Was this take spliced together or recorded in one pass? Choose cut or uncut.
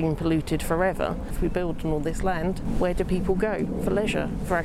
cut